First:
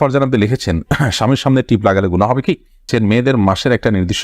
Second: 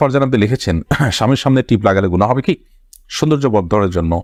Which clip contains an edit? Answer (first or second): first